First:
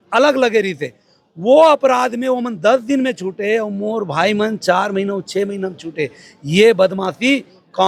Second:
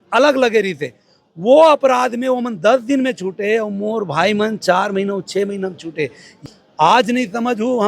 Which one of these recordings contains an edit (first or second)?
second